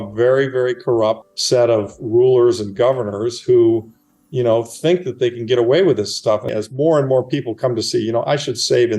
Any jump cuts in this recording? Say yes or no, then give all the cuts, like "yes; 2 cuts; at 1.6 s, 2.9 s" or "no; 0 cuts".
yes; 2 cuts; at 1.3 s, 6.5 s